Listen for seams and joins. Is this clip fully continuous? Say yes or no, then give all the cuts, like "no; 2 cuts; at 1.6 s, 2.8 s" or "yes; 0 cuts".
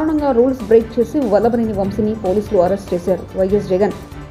yes; 0 cuts